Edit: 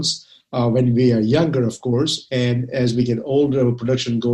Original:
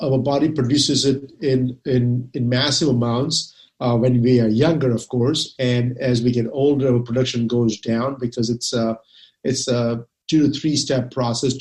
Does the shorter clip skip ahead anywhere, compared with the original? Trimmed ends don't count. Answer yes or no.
no